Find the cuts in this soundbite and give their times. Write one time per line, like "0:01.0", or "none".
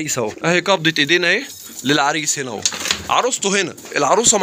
none